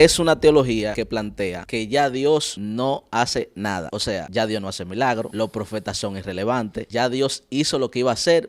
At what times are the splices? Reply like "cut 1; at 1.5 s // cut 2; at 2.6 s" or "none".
cut 1; at 1.1 s // cut 2; at 2.5 s // cut 3; at 4.1 s // cut 4; at 5.3 s // cut 5; at 6.8 s

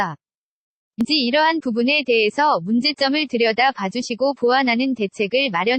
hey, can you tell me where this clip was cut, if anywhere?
cut 1; at 1.0 s

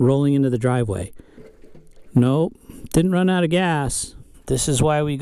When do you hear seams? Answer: cut 1; at 1.8 s // cut 2; at 4.3 s

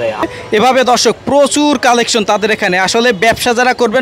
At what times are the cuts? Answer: none

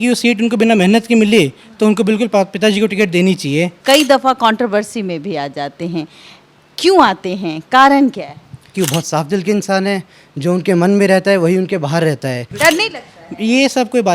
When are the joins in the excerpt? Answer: cut 1; at 3.8 s // cut 2; at 8.7 s // cut 3; at 12.5 s

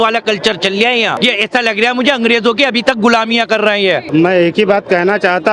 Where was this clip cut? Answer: cut 1; at 1.2 s // cut 2; at 4.0 s

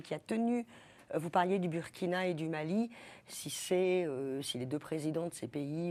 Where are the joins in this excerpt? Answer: none

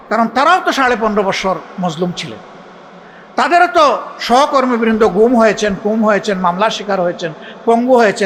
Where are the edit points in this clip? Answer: none

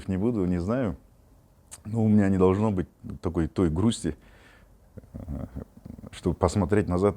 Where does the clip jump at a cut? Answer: none

